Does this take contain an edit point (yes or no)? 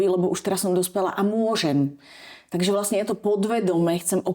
no